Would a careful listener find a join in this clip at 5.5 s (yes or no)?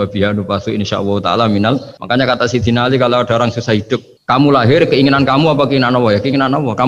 no